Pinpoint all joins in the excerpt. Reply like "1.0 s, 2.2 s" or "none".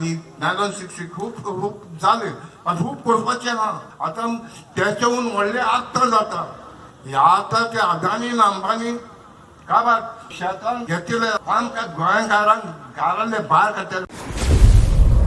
14.1 s